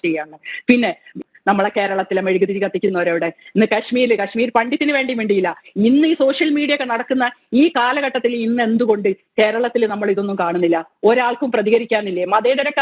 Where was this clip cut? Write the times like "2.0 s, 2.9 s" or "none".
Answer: 1.2 s